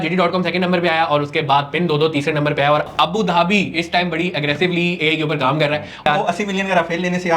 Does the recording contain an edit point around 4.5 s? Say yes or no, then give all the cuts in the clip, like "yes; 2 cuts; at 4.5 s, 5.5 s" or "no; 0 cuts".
no; 2 cuts; at 2.8 s, 6.0 s